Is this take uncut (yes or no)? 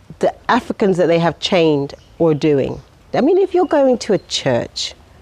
no